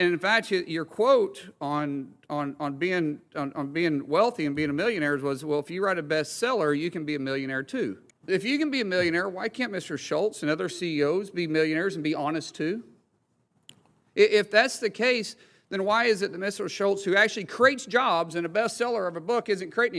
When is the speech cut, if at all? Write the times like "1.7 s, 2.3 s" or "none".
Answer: 8.1 s